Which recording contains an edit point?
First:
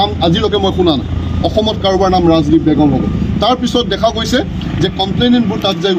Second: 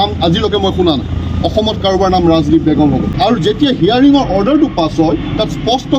second; 1 cut; at 3.1 s

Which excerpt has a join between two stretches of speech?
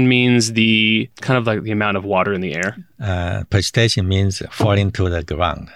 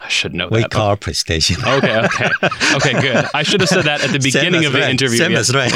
first; 1 cut; at 1.2 s

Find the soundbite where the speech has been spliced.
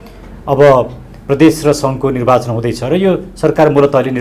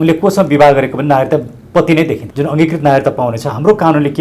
second; 1 cut; at 2.2 s

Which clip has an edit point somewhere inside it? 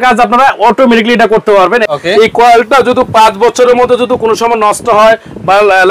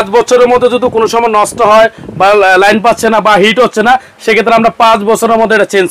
first; 1 cut; at 1.8 s

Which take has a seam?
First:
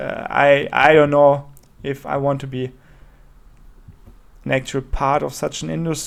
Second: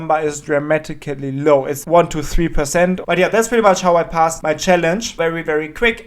second; 4 cuts; at 1.8 s, 3.0 s, 4.4 s, 5.2 s

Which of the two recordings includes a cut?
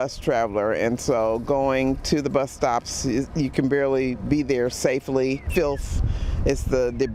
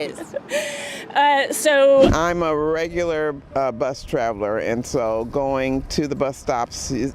second; 1 cut; at 2.1 s

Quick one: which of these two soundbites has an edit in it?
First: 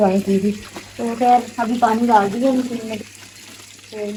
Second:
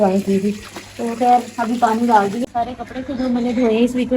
second; 1 cut; at 2.4 s

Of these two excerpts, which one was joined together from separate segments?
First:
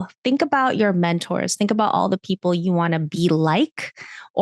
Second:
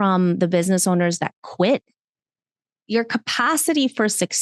second; 1 cut; at 2.8 s

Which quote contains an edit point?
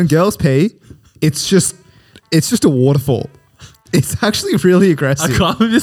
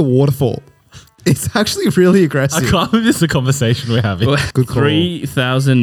second; 1 cut; at 4.5 s

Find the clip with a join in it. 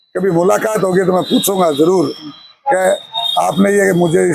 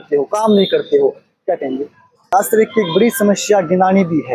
second; 1 cut; at 2.3 s

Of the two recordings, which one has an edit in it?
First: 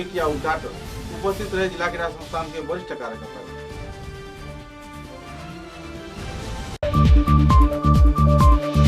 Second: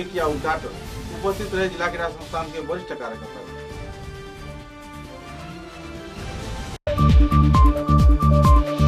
first; 1 cut; at 6.8 s

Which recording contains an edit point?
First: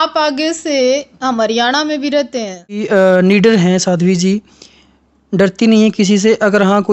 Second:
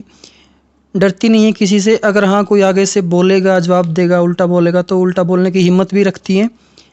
first; 1 cut; at 2.8 s

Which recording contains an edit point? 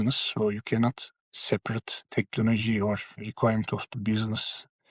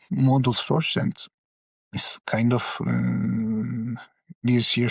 first; 2 cuts; at 2.0 s, 3.2 s

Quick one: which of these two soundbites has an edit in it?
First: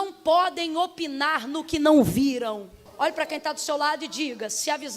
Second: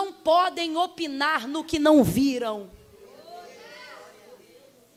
first; 1 cut; at 2.9 s

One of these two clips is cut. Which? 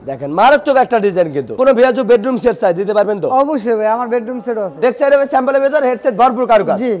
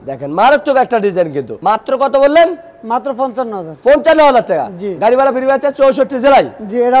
first; 2 cuts; at 1.6 s, 4.7 s

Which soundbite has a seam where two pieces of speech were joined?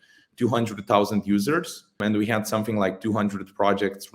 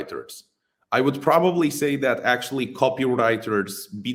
first; 1 cut; at 2.0 s

